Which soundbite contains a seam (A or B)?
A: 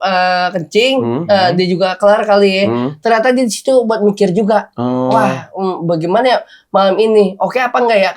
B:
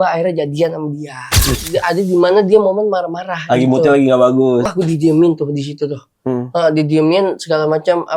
B